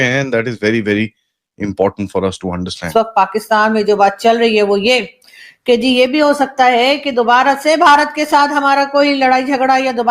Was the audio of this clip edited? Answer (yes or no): yes